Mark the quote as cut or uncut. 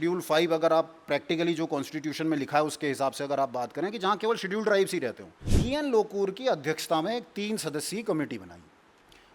cut